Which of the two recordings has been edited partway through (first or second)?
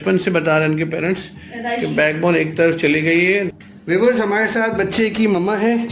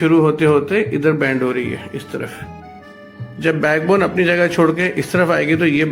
first